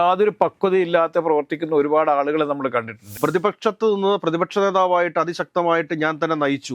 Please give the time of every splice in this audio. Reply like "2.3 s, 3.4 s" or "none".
3.0 s